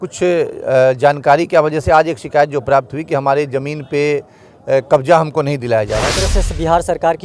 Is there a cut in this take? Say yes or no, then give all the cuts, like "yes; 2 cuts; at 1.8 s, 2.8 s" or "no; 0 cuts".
yes; 1 cut; at 6.1 s